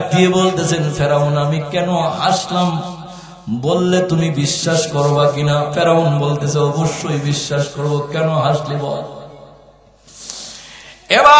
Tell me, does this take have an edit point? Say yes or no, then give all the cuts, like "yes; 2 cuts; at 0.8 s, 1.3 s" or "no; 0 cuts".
no; 0 cuts